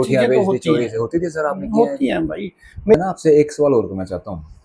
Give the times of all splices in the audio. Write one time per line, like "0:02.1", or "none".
0:02.9